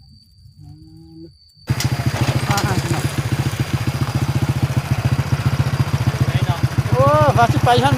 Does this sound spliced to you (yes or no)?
yes